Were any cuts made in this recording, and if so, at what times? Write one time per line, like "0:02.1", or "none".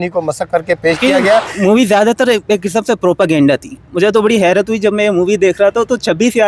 0:01.5